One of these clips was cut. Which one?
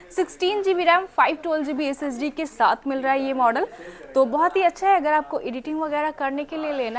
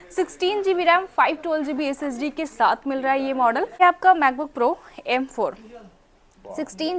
second; 1 cut; at 3.8 s

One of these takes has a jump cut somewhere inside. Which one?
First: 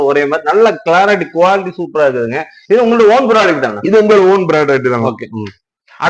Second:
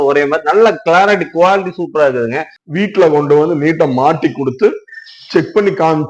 second; 1 cut; at 2.5 s

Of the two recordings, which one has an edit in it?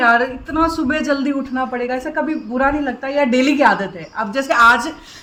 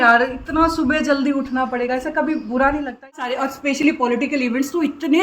second; 1 cut; at 3.2 s

